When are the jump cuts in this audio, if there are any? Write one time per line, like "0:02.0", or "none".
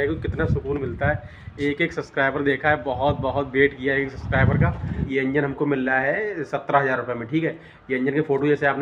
0:05.0